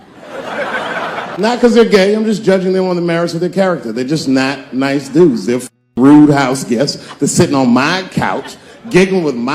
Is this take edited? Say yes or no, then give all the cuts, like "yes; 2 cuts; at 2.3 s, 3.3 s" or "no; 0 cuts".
yes; 1 cut; at 1.4 s